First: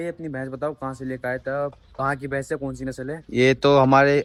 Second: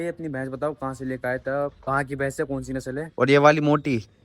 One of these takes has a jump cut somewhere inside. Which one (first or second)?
second